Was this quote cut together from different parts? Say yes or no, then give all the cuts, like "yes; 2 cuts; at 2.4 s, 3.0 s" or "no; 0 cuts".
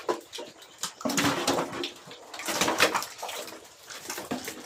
no; 0 cuts